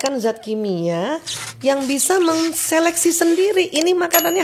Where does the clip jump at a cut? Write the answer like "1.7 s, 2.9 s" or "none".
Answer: none